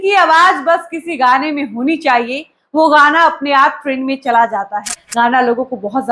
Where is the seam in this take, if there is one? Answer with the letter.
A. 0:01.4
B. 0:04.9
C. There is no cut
B